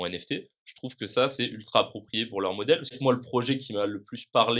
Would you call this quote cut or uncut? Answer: cut